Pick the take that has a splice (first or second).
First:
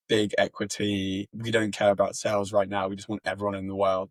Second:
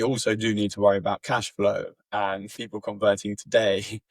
second